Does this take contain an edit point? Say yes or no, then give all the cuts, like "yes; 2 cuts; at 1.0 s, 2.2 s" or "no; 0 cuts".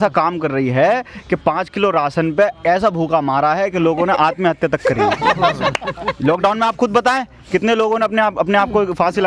no; 0 cuts